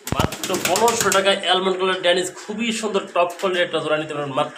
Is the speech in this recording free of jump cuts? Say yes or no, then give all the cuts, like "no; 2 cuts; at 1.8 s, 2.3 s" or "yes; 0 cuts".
yes; 0 cuts